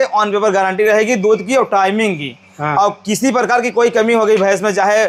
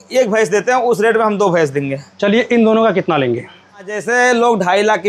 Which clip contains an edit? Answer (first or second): second